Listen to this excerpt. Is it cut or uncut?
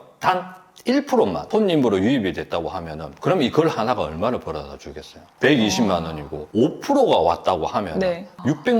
cut